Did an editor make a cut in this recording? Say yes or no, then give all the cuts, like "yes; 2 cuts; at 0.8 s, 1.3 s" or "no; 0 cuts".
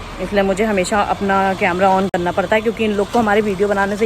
no; 0 cuts